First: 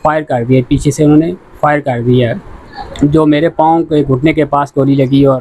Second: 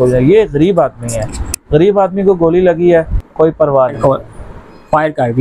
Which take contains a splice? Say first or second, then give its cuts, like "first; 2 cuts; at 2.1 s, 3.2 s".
second; 1 cut; at 4.0 s